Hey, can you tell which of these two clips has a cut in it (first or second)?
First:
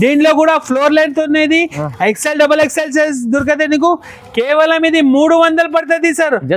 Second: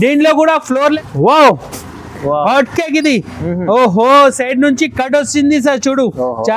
second